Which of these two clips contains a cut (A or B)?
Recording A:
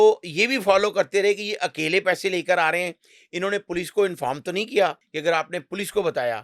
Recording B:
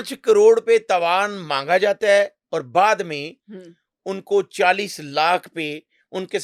A